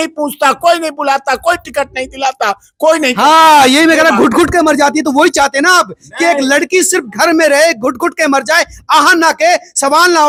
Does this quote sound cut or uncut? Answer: uncut